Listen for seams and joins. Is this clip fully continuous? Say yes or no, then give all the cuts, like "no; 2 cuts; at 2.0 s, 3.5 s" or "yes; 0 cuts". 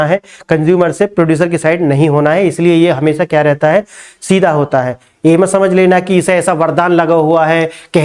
yes; 0 cuts